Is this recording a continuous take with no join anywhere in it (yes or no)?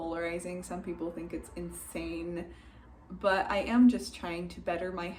yes